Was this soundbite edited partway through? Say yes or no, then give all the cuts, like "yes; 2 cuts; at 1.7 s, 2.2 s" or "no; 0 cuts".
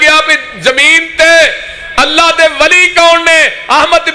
no; 0 cuts